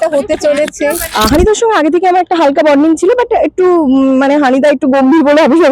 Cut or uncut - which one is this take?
cut